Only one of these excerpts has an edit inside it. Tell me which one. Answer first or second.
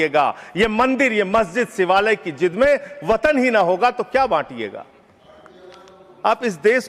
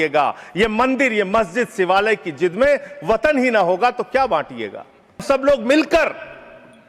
second